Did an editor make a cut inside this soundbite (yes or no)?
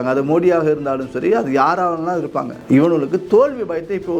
yes